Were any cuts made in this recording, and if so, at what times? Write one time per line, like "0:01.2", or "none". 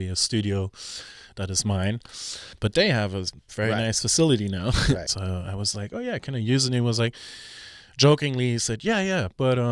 0:02.4
0:05.1